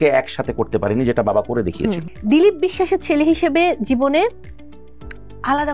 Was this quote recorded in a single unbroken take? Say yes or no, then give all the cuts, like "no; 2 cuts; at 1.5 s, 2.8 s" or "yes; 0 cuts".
no; 1 cut; at 2.1 s